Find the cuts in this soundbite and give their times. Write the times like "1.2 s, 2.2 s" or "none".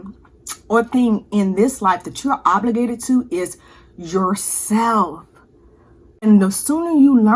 6.2 s